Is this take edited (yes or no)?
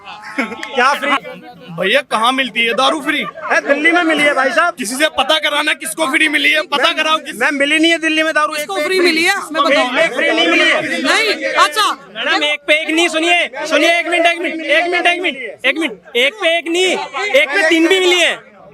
yes